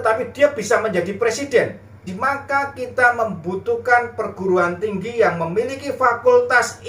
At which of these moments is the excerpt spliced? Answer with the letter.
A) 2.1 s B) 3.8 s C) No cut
A